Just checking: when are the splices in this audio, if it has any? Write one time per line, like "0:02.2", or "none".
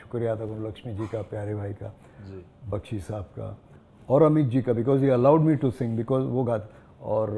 none